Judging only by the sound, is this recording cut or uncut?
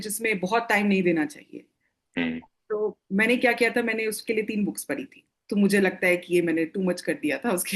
uncut